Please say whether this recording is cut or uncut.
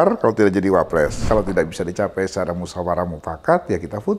cut